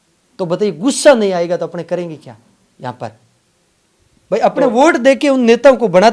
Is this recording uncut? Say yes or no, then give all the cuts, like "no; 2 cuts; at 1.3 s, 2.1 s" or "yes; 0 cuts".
yes; 0 cuts